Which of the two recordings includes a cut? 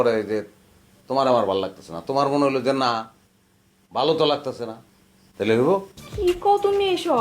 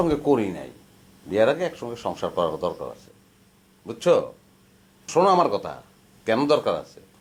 first; 1 cut; at 6.0 s

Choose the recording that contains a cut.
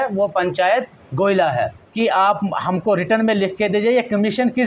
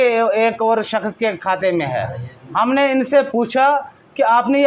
first; 1 cut; at 1.8 s

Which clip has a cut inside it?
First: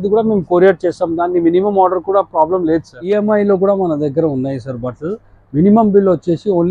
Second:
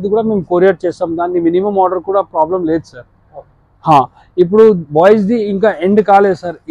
first; 1 cut; at 3.0 s

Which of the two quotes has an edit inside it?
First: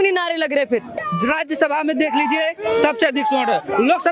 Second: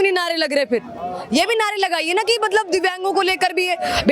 first; 1 cut; at 1.0 s

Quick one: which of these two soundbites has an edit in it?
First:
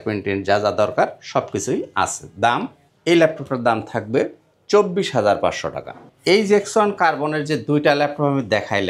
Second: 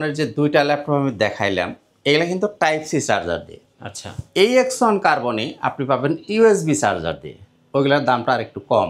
first; 1 cut; at 6.0 s

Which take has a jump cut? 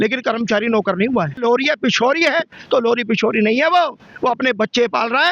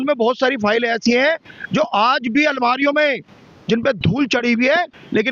first; 1 cut; at 1.4 s

